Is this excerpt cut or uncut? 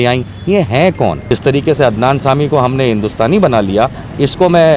cut